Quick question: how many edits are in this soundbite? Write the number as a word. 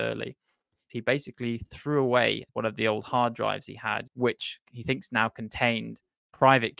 three